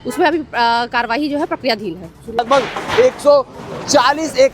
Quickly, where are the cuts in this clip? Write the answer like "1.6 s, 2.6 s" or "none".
2.4 s